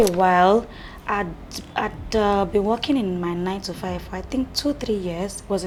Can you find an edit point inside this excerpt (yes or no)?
no